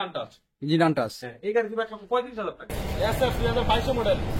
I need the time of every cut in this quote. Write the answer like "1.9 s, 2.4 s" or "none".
2.8 s